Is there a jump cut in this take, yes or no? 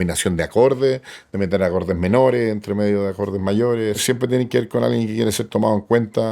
yes